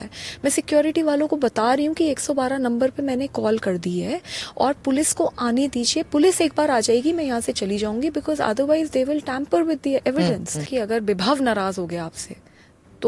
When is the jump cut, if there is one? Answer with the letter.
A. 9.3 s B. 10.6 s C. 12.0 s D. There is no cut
B